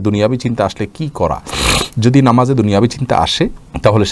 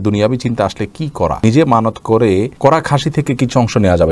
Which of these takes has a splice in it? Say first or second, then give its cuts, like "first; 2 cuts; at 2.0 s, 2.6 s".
second; 2 cuts; at 1.4 s, 2.5 s